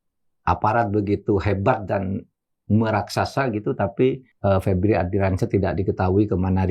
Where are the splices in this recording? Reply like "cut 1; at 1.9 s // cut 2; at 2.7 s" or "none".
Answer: cut 1; at 4.3 s